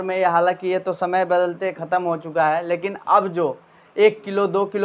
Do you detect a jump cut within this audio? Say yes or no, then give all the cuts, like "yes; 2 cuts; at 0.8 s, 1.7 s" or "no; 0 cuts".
no; 0 cuts